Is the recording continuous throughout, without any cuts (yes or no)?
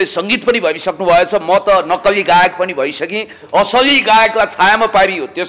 yes